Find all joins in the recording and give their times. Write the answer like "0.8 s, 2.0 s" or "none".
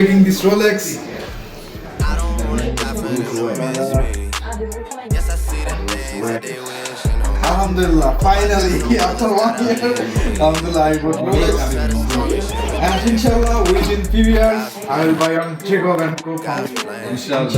none